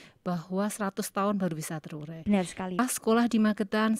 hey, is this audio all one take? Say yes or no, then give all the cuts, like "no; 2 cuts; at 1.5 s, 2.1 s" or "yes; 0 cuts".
no; 1 cut; at 2.8 s